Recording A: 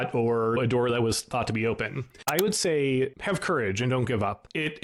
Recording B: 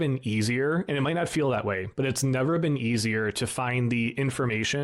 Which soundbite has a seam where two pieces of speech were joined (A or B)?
A